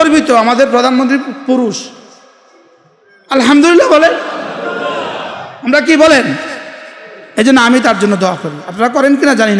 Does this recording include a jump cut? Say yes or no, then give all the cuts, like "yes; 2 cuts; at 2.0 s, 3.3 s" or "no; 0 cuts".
no; 0 cuts